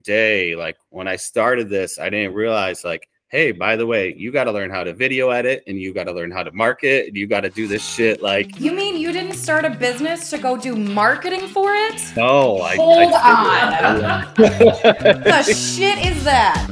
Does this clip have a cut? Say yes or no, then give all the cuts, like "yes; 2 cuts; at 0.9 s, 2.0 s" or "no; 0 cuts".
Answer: no; 0 cuts